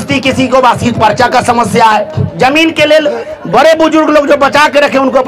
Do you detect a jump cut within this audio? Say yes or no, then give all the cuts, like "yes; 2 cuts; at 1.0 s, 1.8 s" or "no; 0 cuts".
yes; 1 cut; at 2.2 s